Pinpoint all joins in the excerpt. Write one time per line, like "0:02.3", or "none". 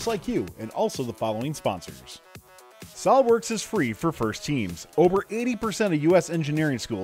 0:02.4